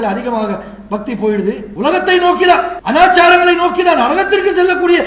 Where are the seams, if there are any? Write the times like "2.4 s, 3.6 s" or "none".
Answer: 1.7 s, 2.8 s